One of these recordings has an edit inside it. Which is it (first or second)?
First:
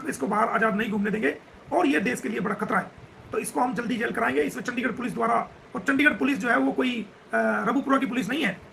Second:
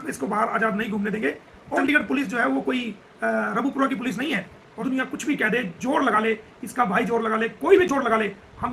second